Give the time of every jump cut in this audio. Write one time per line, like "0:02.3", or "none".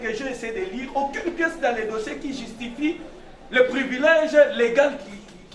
none